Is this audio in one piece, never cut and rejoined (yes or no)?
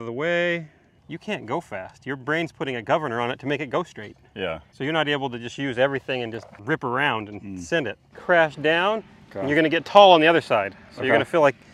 no